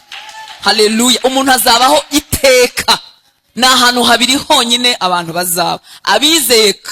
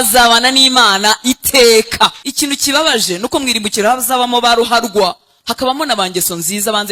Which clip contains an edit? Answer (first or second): second